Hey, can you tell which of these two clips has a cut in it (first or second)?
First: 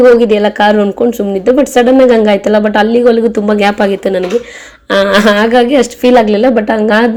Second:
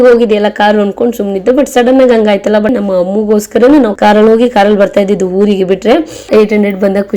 second